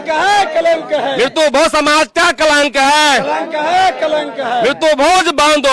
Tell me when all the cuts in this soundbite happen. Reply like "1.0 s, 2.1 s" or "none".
none